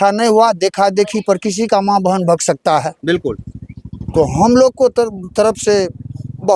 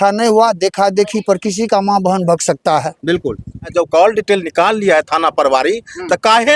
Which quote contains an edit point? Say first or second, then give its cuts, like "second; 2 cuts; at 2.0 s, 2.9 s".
second; 1 cut; at 3.7 s